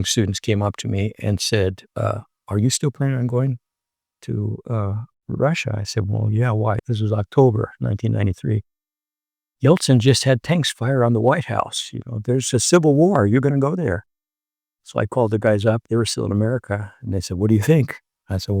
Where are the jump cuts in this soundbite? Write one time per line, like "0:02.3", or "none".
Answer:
none